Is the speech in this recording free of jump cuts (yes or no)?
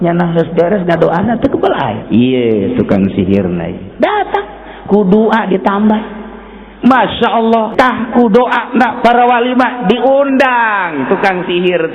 no